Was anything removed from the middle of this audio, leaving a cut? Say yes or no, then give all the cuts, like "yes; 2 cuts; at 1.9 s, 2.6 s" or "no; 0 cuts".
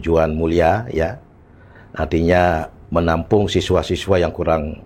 no; 0 cuts